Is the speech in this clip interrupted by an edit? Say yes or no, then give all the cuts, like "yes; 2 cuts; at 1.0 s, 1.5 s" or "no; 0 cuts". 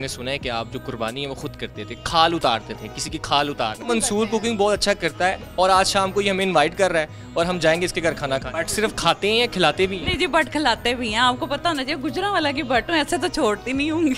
yes; 2 cuts; at 3.9 s, 8.6 s